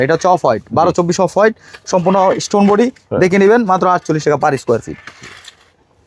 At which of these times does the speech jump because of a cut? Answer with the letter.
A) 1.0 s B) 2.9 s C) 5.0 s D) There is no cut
D